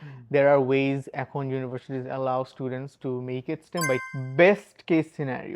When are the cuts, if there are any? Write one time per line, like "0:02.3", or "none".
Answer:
0:04.0

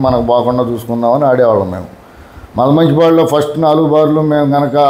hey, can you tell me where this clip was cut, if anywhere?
none

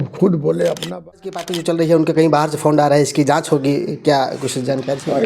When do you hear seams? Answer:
0:01.5

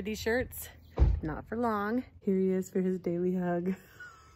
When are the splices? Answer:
0:02.1

